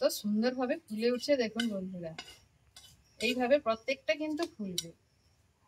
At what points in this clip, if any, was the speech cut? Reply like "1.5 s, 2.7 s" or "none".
none